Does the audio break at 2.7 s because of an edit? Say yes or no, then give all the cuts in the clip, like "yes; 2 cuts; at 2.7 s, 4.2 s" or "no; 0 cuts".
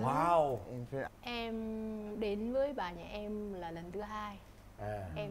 no; 1 cut; at 1.1 s